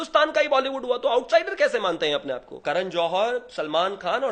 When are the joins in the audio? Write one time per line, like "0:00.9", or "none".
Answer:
0:02.5